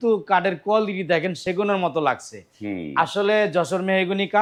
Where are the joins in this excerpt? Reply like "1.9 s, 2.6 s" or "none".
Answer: none

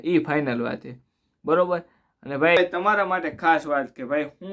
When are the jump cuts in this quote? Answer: 2.6 s

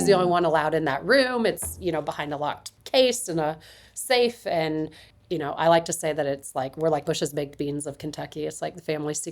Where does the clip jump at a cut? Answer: 2.7 s, 5.0 s, 7.0 s

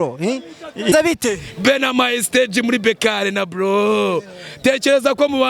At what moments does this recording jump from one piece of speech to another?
0.9 s

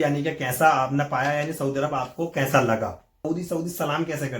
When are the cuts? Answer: 3.2 s

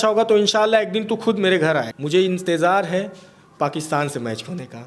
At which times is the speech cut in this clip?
2.0 s

